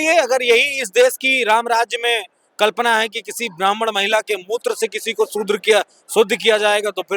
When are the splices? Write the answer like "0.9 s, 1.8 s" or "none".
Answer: none